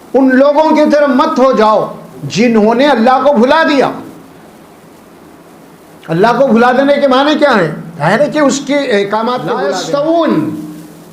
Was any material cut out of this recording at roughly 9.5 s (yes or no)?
yes